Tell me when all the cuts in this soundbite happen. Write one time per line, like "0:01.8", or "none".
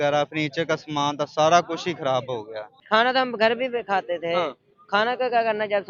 0:02.8